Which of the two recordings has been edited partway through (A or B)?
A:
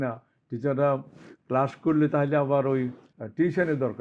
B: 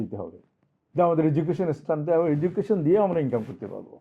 A